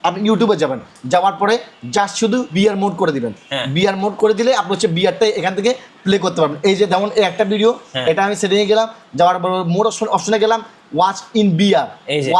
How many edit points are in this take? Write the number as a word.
two